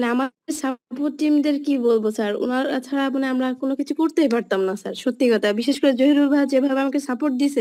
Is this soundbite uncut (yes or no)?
yes